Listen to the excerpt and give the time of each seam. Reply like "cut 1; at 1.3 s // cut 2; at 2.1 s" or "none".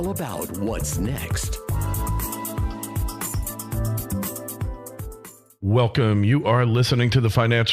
cut 1; at 5.4 s